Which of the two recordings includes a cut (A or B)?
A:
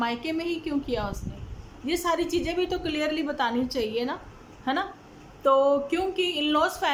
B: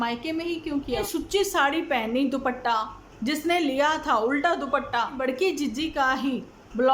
B